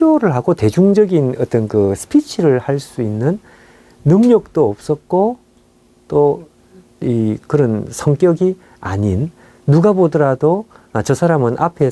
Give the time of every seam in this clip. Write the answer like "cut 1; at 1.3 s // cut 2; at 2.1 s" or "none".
none